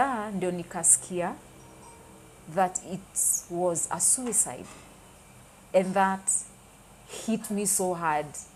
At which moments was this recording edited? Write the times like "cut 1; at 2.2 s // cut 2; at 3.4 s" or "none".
none